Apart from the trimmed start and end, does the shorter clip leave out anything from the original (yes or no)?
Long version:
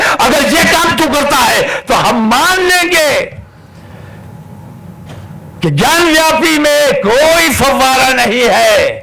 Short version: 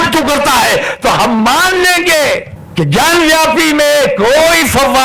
yes